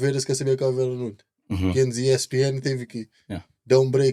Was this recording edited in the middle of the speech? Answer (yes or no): no